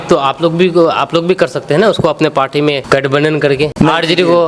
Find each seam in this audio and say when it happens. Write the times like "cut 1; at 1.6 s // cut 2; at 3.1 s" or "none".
cut 1; at 2.8 s // cut 2; at 3.7 s